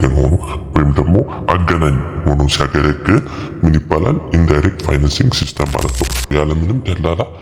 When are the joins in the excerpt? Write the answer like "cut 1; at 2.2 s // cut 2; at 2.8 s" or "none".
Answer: cut 1; at 6.3 s